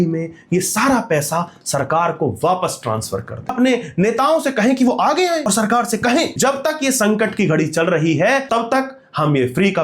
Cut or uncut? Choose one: cut